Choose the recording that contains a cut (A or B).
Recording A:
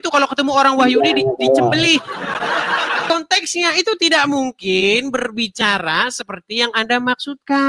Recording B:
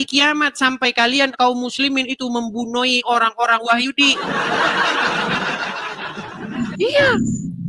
A